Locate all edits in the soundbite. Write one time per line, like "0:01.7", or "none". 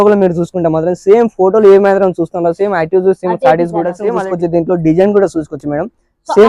0:04.1